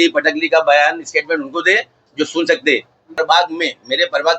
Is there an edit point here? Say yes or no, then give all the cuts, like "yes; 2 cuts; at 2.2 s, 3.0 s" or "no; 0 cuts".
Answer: yes; 1 cut; at 3.2 s